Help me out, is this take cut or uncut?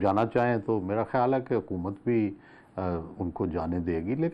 uncut